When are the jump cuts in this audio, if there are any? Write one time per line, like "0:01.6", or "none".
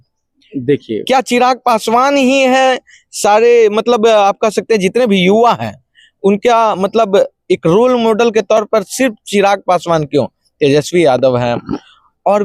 none